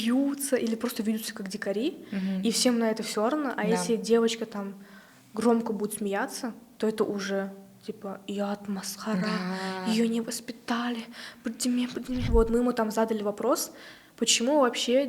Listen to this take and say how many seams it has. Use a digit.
1